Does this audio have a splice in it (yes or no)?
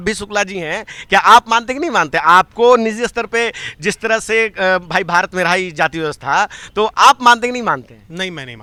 no